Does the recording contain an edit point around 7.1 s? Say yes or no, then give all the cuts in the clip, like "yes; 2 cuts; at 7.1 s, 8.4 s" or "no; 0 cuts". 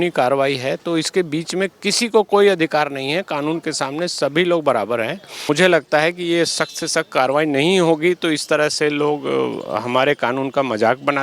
no; 1 cut; at 5.5 s